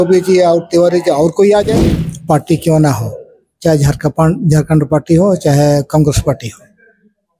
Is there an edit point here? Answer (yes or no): yes